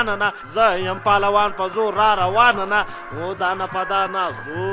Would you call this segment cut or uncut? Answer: uncut